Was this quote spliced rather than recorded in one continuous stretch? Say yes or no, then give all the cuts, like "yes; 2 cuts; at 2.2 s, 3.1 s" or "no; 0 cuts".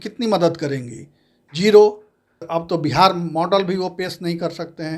yes; 1 cut; at 2.5 s